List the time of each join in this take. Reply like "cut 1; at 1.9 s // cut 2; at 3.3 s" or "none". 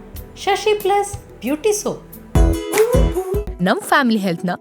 cut 1; at 2.1 s